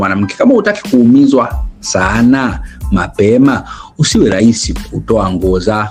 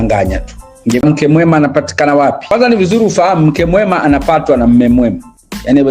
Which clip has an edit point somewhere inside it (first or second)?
second